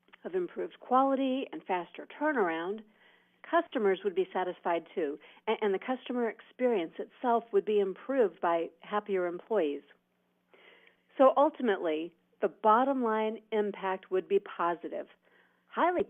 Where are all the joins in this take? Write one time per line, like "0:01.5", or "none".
0:04.3